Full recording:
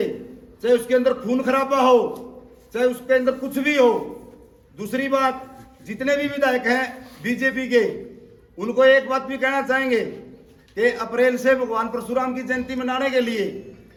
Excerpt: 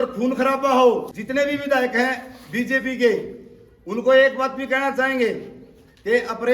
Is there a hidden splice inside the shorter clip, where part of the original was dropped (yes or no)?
yes